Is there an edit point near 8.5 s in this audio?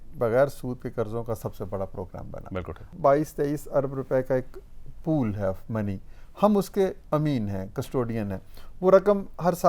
no; 1 cut; at 2.8 s

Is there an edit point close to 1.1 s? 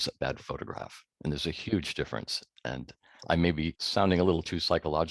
no; 1 cut; at 3.8 s

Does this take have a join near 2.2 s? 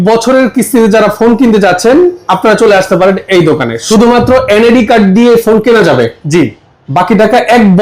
no; 1 cut; at 3.8 s

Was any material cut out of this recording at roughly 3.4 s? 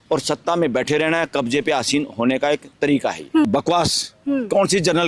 yes; 1 cut; at 3.4 s

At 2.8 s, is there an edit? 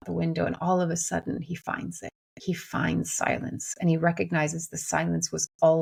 no; 0 cuts

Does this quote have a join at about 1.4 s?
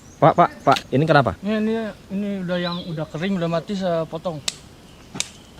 yes; 2 cuts; at 0.8 s, 1.4 s

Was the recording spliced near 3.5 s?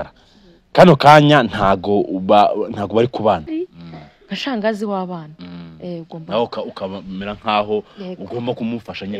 yes; 1 cut; at 3.5 s

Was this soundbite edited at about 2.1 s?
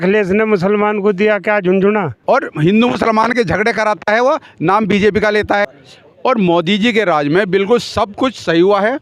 yes; 2 cuts; at 2.1 s, 5.7 s

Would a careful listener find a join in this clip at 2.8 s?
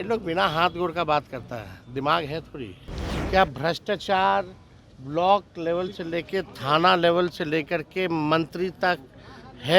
yes; 1 cut; at 2.8 s

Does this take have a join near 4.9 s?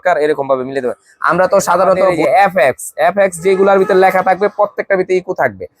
no; 1 cut; at 2.2 s

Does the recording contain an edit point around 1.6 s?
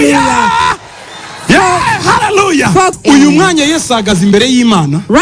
no; 1 cut; at 3.0 s

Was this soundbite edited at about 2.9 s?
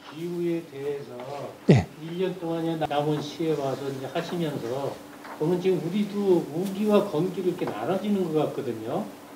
yes; 1 cut; at 2.9 s

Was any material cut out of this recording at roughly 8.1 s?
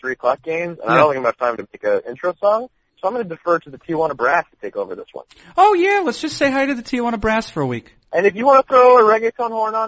yes; 1 cut; at 8.1 s

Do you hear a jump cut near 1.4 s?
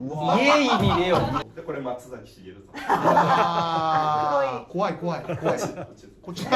yes; 1 cut; at 1.4 s

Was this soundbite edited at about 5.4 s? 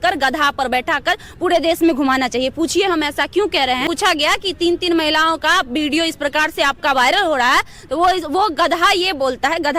no; 1 cut; at 3.8 s

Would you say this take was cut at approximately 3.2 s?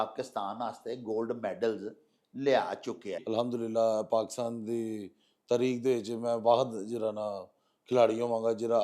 yes; 1 cut; at 3.2 s

